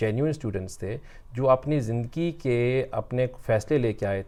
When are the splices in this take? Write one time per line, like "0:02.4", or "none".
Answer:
none